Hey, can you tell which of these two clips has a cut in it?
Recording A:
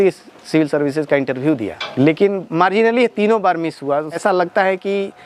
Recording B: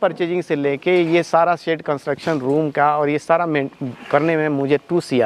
A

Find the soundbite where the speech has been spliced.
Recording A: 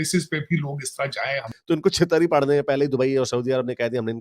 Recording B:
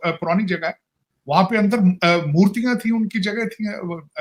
A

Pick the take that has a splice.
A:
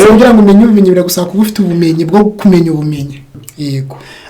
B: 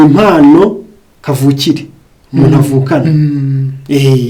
A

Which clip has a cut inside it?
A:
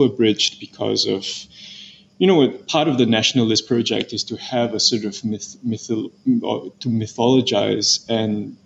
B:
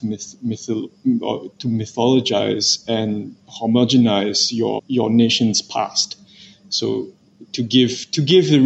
B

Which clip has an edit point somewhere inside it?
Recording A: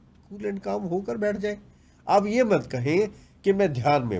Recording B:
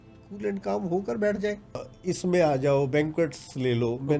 B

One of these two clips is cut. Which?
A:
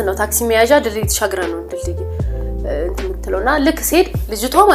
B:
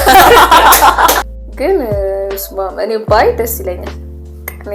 B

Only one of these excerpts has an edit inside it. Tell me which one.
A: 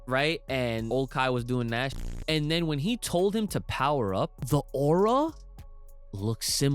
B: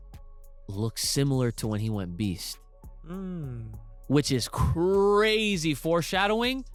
A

